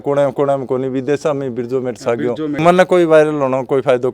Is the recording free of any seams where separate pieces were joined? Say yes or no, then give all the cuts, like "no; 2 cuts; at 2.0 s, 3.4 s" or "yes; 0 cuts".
no; 1 cut; at 2.6 s